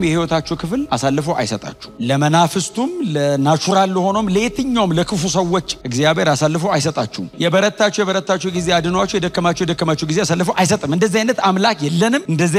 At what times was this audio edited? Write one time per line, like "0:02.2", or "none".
none